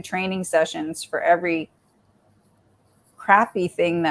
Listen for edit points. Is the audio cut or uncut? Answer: uncut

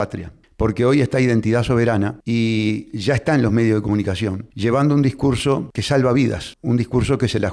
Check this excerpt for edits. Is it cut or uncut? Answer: cut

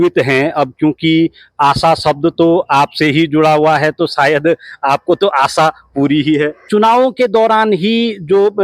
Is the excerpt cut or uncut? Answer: cut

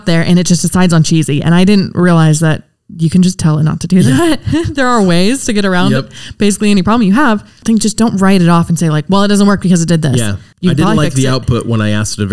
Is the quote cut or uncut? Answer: cut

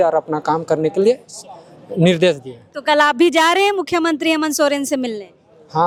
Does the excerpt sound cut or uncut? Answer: uncut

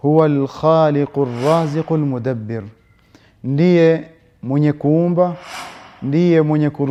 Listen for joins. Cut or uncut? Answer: uncut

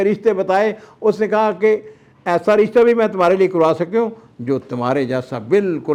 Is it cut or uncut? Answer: uncut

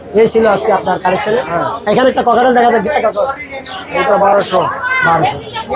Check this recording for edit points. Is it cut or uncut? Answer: uncut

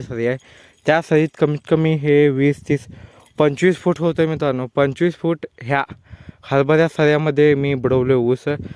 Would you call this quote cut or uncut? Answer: uncut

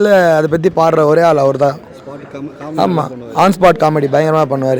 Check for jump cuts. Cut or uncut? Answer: uncut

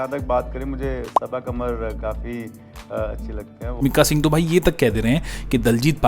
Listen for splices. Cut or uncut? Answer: cut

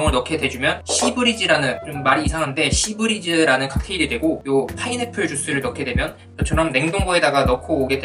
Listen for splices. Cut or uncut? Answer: cut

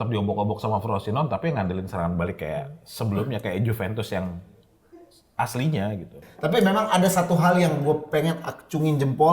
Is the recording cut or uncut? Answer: cut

